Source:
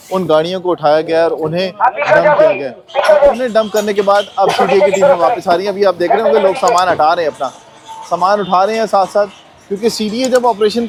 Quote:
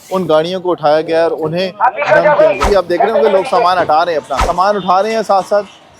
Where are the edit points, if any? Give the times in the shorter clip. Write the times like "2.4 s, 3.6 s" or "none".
2.6 s, 4.4 s